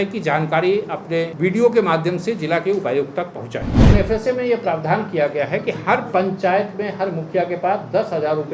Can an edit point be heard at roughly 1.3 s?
yes; 2 cuts; at 1.3 s, 3.9 s

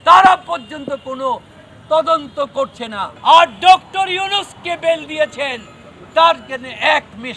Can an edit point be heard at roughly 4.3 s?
no; 1 cut; at 3.1 s

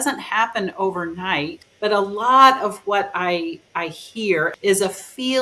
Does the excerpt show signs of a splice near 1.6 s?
yes; 2 cuts; at 1.6 s, 4.5 s

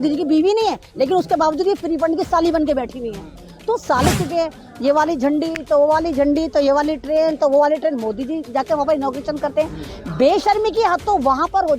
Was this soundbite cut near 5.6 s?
no; 1 cut; at 4.1 s

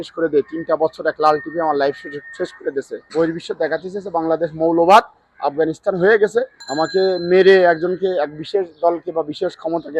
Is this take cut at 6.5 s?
yes; 2 cuts; at 3.0 s, 6.5 s

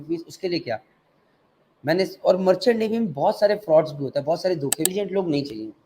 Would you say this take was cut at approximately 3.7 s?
no; 1 cut; at 4.9 s

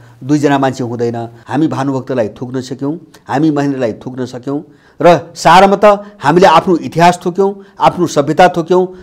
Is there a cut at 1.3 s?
yes; 1 cut; at 1.3 s

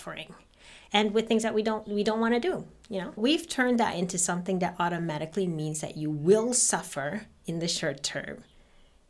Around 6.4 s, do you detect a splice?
no; 1 cut; at 3.2 s

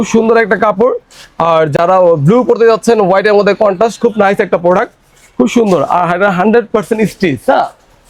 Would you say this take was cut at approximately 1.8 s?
no; 0 cuts

